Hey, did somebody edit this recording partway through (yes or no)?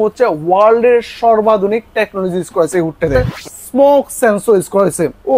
yes